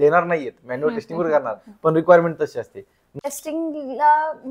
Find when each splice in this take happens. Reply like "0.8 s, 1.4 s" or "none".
3.2 s

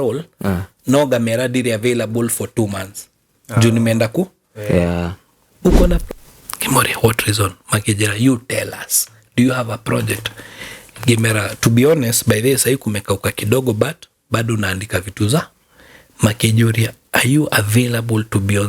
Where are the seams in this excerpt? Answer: 6.0 s

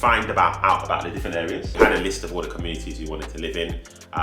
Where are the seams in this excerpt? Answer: 1.7 s

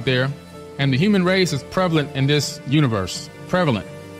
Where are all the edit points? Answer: 2.6 s

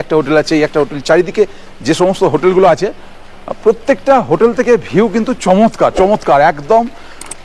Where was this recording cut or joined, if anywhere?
none

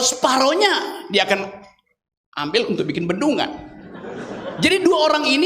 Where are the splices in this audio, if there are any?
none

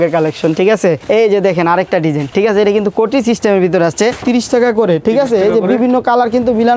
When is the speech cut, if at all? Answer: 1.0 s, 2.3 s, 4.2 s

